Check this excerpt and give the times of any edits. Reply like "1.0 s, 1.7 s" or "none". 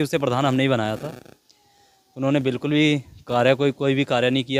none

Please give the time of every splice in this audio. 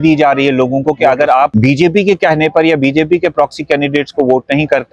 1.5 s

